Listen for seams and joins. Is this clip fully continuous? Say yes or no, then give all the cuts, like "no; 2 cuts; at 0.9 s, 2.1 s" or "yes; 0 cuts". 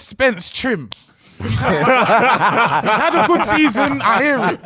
yes; 0 cuts